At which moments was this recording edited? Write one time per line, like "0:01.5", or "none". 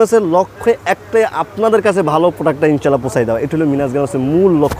none